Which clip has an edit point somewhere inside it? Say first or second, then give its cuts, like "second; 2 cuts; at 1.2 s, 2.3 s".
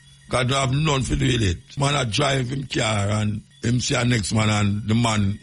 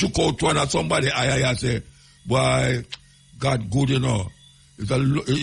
first; 2 cuts; at 1.7 s, 3.5 s